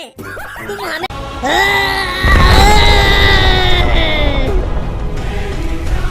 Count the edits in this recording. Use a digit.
1